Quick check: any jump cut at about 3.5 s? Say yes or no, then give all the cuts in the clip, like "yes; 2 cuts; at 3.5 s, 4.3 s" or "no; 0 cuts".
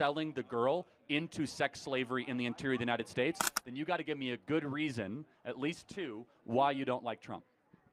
yes; 1 cut; at 3.5 s